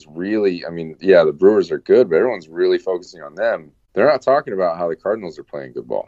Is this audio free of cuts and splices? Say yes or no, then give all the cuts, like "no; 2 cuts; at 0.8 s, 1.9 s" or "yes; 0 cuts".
no; 1 cut; at 3.8 s